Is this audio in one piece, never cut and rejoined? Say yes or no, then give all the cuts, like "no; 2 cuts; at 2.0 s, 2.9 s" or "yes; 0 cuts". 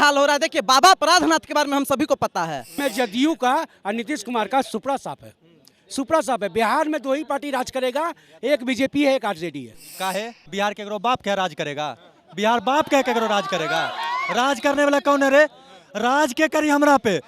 no; 2 cuts; at 2.8 s, 9.8 s